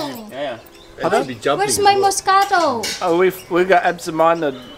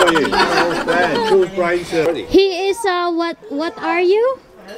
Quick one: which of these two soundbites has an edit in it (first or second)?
second